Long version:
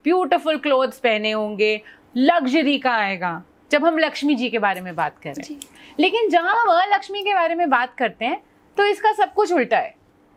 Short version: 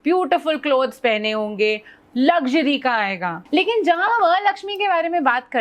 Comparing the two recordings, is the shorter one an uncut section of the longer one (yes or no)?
no